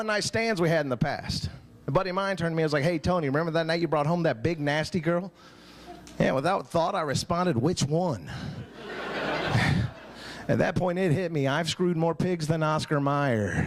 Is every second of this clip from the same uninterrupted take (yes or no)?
yes